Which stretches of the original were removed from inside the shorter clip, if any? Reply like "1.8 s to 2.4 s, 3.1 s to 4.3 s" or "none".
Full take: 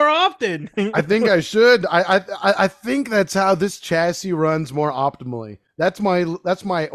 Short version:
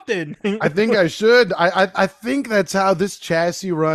2.3 s to 2.6 s